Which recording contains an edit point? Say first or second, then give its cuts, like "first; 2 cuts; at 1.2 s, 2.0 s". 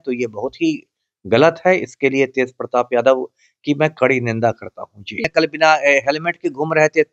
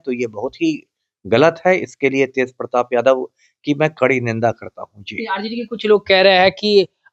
first; 1 cut; at 5.2 s